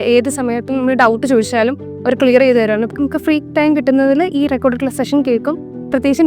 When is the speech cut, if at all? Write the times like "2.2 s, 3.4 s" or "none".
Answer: 2.9 s